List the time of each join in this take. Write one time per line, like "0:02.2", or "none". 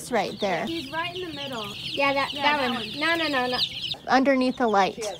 0:00.7
0:01.8
0:03.9